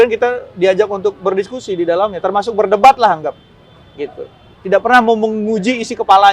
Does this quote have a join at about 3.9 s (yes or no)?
no